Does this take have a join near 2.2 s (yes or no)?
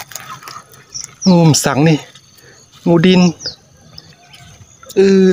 no